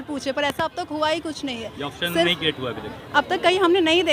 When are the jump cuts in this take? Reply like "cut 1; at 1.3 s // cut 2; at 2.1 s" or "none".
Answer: none